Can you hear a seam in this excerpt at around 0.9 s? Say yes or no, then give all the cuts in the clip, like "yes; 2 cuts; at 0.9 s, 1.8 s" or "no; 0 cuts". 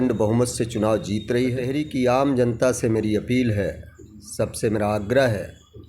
no; 1 cut; at 2.2 s